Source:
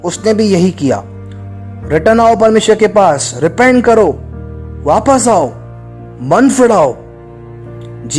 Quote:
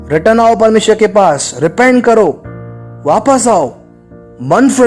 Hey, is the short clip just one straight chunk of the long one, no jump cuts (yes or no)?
yes